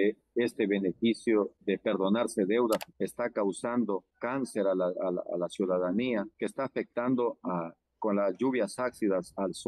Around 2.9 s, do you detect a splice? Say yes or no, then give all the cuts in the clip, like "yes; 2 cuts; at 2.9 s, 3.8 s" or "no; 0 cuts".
yes; 1 cut; at 2.9 s